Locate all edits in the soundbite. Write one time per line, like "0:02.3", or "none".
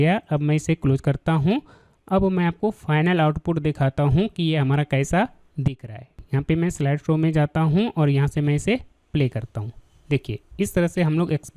0:06.2